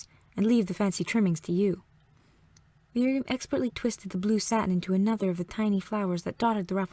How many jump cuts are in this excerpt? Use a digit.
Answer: 1